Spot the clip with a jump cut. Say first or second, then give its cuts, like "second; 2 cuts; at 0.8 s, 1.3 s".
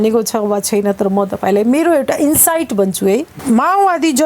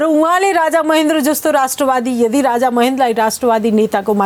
first; 1 cut; at 3.3 s